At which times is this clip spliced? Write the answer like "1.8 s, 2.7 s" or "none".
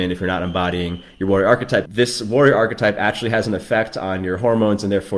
1.9 s